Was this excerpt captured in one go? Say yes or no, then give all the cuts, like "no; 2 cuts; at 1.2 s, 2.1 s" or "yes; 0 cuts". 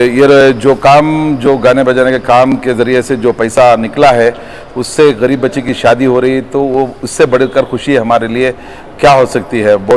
yes; 0 cuts